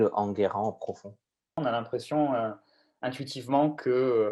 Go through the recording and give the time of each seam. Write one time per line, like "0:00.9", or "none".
0:01.6